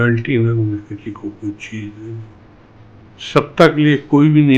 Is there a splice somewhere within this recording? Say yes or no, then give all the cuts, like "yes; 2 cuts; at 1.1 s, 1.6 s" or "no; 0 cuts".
no; 0 cuts